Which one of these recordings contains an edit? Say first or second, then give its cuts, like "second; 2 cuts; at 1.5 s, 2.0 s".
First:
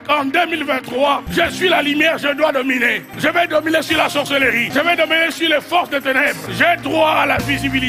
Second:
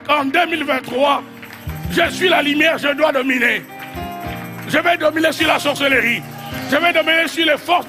first; 4 cuts; at 1.3 s, 3.1 s, 4.7 s, 6.4 s